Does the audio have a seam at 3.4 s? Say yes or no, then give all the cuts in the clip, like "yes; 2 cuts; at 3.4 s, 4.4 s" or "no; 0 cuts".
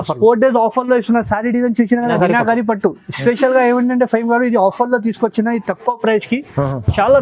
no; 1 cut; at 2.1 s